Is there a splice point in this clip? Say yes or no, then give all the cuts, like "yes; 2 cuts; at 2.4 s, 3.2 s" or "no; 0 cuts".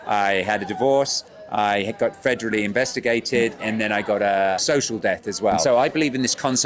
yes; 3 cuts; at 3.6 s, 4.6 s, 5.6 s